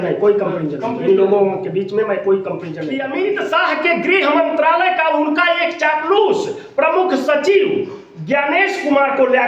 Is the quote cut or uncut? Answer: cut